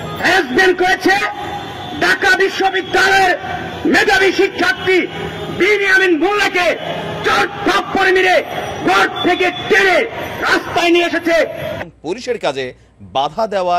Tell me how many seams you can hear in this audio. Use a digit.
1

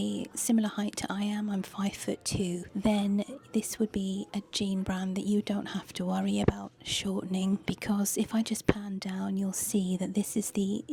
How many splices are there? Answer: 0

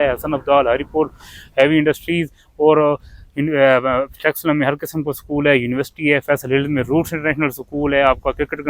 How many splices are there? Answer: 0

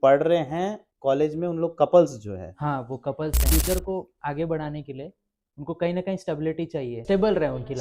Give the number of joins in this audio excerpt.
2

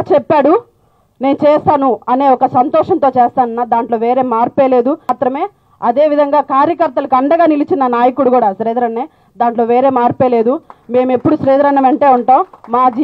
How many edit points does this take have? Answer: 1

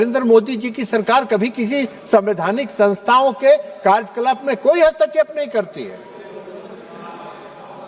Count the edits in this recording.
0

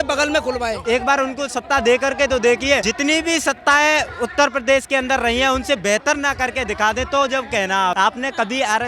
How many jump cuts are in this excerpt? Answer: 3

